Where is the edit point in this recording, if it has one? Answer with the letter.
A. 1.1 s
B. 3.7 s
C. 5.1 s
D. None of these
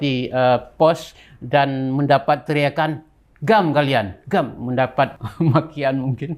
C